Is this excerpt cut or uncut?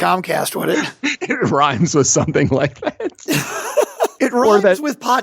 cut